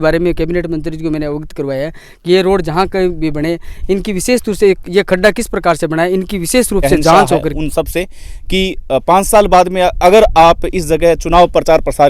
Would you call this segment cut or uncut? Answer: cut